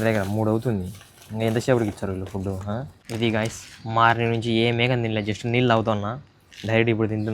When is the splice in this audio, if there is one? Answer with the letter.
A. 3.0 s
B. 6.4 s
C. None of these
A